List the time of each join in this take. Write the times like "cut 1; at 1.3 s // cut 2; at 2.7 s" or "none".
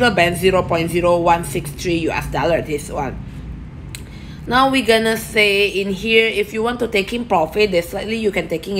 none